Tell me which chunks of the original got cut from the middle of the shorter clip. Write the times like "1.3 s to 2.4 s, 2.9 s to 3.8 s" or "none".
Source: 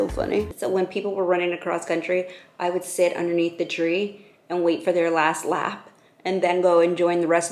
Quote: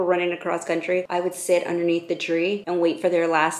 2.3 s to 2.6 s, 4.1 s to 4.5 s